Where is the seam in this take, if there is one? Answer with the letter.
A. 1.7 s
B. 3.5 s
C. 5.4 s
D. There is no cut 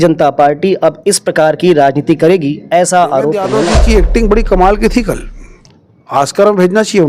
B